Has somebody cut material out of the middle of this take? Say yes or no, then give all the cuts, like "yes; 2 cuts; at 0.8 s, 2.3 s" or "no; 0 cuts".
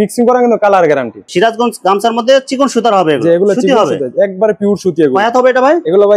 yes; 1 cut; at 1.2 s